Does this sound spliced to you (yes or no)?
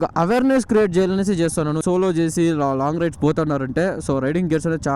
yes